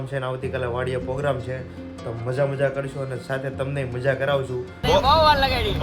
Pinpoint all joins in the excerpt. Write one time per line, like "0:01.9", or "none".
0:04.8